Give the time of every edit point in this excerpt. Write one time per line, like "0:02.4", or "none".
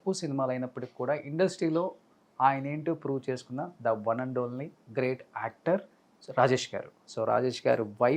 0:07.1